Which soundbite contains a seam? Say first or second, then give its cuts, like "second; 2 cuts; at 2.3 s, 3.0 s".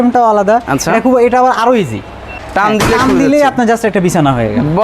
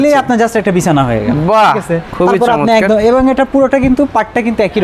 first; 1 cut; at 2.3 s